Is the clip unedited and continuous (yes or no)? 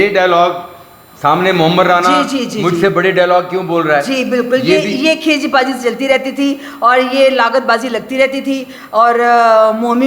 yes